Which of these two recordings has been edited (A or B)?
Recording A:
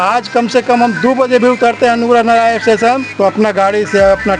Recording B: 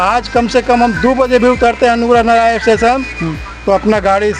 A